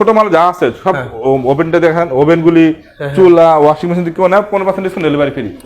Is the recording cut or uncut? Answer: uncut